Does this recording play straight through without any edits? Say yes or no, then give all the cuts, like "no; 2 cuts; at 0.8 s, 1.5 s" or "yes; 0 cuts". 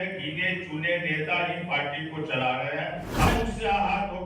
no; 1 cut; at 3.3 s